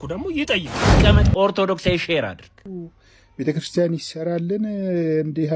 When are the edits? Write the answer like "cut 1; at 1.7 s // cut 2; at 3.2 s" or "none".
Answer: cut 1; at 0.9 s